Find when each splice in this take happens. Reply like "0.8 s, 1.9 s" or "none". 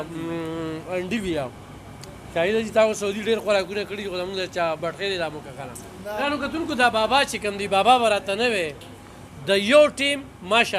6.2 s